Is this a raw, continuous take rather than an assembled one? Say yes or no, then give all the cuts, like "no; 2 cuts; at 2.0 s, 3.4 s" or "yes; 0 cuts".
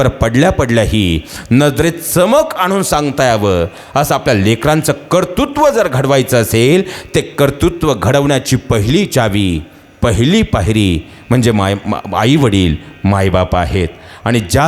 yes; 0 cuts